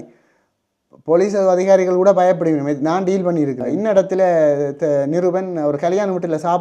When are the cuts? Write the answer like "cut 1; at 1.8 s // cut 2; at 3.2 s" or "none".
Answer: cut 1; at 3.7 s